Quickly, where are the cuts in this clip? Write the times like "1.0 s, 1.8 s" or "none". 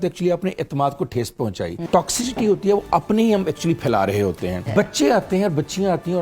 1.9 s, 4.7 s